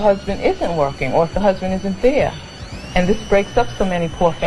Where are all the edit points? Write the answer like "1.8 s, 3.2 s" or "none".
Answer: 2.5 s